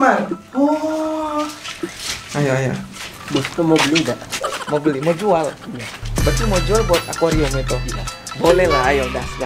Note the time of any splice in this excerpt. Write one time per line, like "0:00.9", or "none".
none